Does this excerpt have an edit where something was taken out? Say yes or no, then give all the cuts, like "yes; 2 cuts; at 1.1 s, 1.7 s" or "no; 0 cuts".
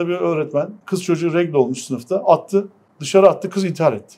no; 0 cuts